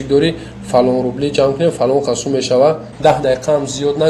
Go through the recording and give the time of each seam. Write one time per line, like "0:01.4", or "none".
0:02.9